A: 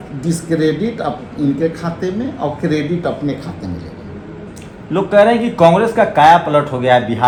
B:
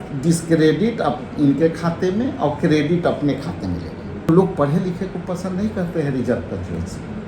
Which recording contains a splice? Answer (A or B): B